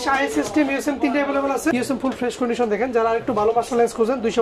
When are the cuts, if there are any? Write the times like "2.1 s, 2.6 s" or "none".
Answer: 1.7 s